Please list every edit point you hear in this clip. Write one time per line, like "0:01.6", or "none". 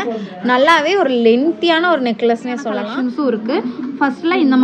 0:02.8

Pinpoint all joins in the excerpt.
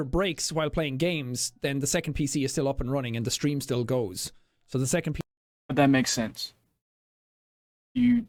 none

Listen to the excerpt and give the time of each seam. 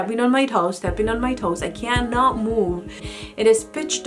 0:03.1

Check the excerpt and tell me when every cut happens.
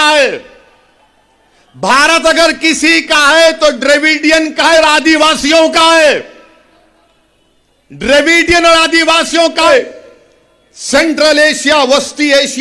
0:09.7

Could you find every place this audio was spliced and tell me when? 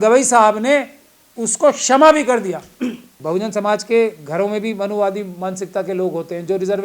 0:03.1

